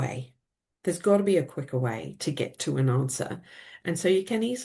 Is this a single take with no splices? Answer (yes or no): yes